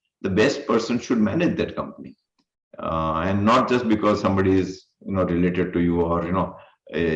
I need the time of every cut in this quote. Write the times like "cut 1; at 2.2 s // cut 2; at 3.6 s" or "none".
none